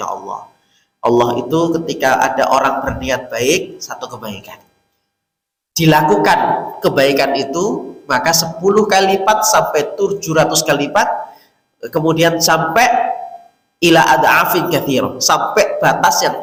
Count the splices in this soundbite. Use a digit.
0